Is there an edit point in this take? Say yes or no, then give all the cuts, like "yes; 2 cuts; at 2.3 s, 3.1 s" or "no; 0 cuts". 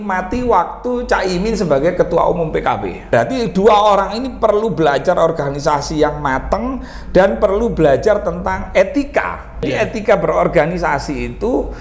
yes; 2 cuts; at 3.0 s, 9.7 s